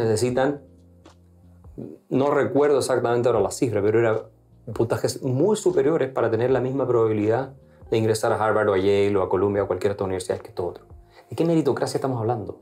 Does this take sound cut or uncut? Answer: uncut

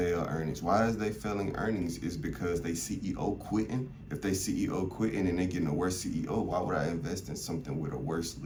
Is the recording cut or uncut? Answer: uncut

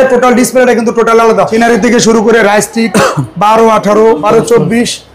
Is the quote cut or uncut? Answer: cut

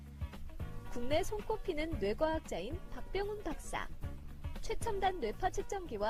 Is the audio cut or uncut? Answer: uncut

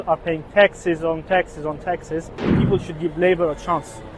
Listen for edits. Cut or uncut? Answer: cut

